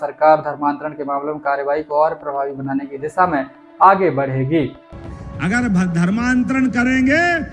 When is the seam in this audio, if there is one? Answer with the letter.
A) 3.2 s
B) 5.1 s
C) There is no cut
B